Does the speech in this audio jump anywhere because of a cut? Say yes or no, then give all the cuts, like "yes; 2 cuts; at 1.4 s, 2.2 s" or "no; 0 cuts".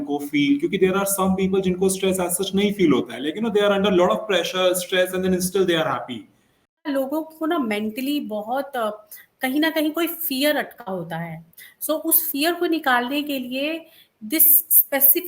yes; 1 cut; at 6.8 s